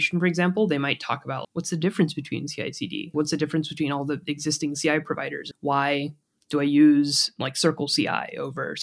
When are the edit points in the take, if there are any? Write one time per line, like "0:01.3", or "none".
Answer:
0:01.4
0:03.1
0:05.4